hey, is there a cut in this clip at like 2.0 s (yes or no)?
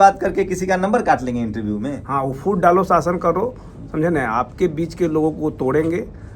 yes